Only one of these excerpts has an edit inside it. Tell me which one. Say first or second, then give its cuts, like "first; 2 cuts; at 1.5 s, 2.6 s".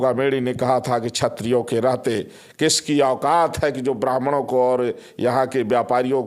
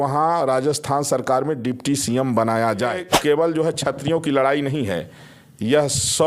second; 1 cut; at 3.1 s